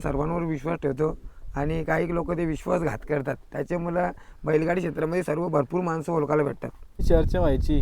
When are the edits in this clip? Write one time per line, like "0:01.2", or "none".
0:06.9